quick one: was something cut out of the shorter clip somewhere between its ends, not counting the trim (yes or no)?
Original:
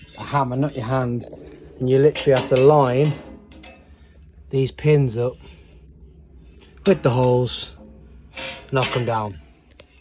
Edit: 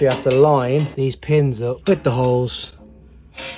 yes